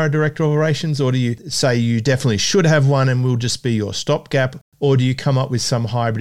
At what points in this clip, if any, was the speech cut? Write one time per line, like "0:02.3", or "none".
0:04.6